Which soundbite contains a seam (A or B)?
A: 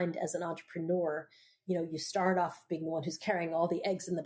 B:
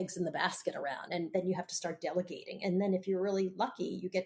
B